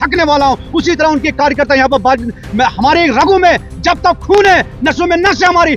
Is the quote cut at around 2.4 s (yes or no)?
no